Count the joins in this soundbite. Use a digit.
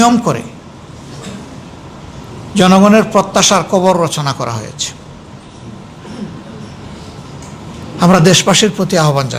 1